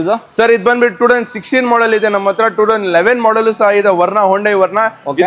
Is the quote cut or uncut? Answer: uncut